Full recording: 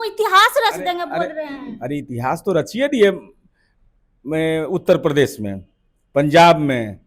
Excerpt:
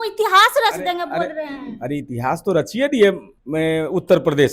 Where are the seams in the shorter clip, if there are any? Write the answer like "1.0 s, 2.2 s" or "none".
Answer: 3.3 s